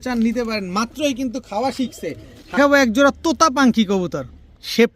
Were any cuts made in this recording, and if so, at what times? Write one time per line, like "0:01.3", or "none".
0:02.6